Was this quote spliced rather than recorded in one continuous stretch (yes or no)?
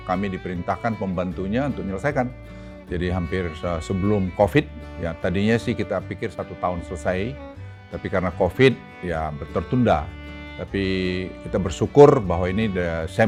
no